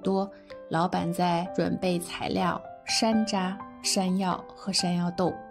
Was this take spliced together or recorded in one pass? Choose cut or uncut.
cut